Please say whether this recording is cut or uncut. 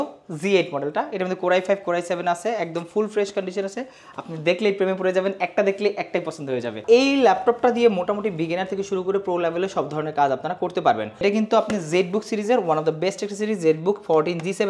cut